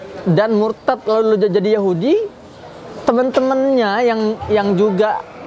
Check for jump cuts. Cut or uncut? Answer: uncut